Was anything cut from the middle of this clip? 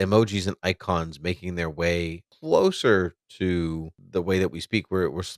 yes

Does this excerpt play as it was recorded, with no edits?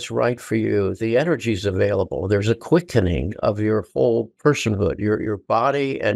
yes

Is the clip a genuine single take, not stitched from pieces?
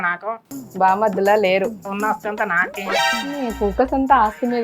no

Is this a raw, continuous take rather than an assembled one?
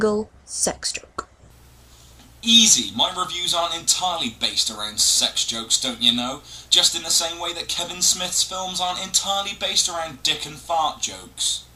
yes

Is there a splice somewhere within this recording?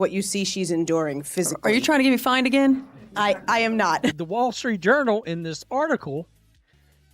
yes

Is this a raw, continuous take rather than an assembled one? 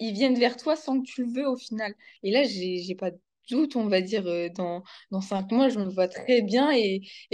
no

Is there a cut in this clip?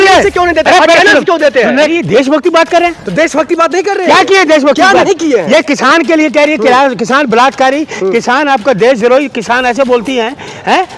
yes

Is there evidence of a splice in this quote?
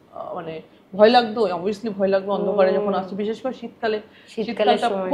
no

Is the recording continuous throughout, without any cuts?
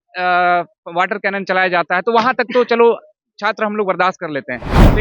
yes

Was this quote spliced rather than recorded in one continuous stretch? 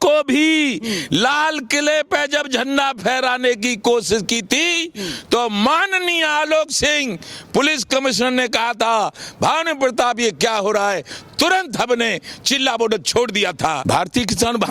yes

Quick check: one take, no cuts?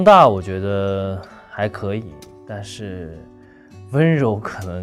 yes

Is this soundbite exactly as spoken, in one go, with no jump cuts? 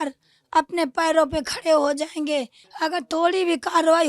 no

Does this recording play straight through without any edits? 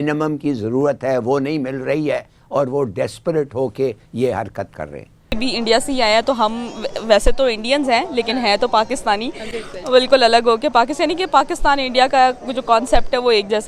no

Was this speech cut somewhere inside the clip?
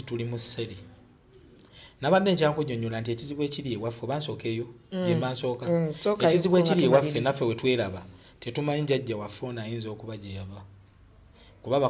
no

